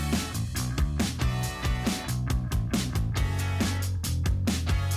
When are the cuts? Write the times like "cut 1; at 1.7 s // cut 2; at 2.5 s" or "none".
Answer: cut 1; at 2.3 s